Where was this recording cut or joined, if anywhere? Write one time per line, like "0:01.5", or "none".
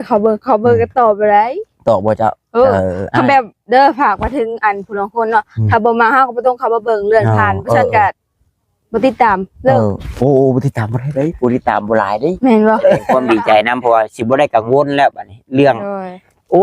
0:13.1